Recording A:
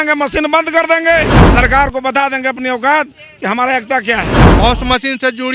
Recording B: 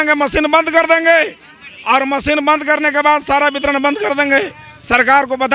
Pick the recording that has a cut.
A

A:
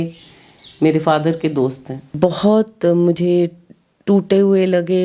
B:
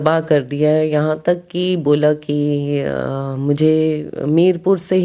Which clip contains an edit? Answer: A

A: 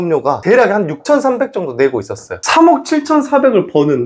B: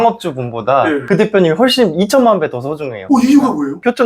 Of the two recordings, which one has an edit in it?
A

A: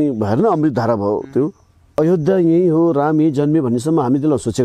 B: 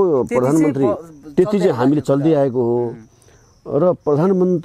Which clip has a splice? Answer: A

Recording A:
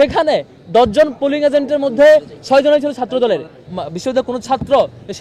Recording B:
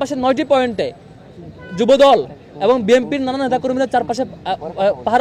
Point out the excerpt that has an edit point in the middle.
A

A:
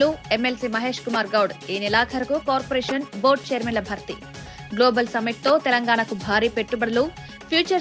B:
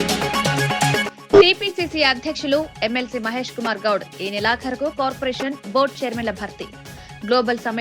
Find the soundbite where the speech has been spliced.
B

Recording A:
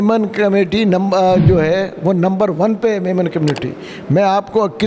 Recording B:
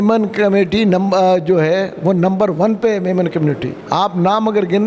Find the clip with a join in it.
B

